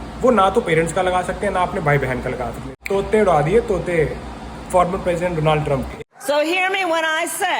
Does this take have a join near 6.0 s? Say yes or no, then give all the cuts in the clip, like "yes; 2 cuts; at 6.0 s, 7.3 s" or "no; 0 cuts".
yes; 2 cuts; at 2.7 s, 6.0 s